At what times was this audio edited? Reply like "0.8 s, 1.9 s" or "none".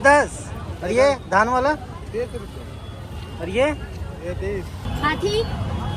4.8 s